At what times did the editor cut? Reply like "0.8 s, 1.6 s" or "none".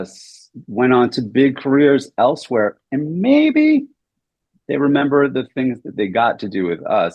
none